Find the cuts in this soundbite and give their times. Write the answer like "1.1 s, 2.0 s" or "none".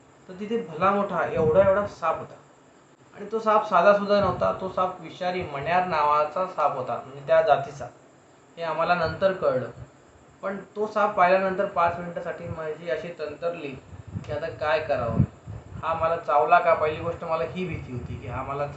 none